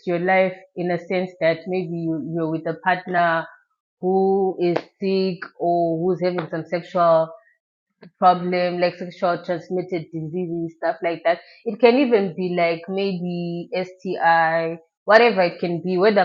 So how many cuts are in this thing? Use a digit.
0